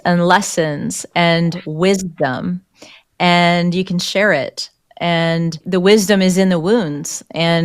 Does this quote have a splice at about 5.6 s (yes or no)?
yes